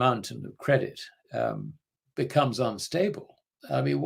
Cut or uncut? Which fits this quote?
uncut